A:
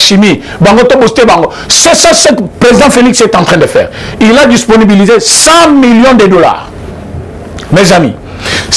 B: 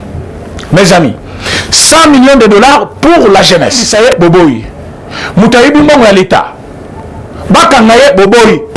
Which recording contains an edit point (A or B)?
B